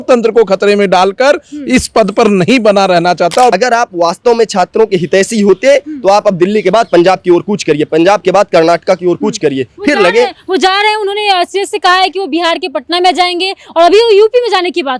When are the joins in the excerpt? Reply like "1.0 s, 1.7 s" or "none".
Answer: 3.5 s